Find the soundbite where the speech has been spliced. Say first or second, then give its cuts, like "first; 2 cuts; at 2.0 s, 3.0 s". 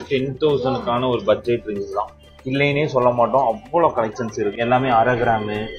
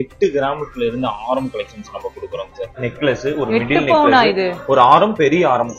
second; 1 cut; at 2.7 s